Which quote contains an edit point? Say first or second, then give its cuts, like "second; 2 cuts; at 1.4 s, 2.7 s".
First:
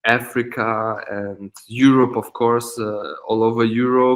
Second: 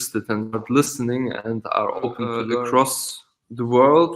second; 1 cut; at 2.4 s